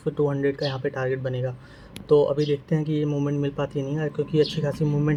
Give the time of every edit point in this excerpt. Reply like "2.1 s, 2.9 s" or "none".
none